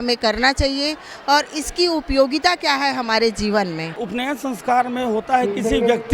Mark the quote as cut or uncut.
cut